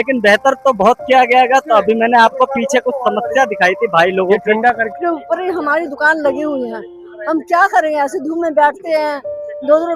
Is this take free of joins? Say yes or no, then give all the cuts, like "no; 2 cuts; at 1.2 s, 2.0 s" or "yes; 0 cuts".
no; 1 cut; at 4.9 s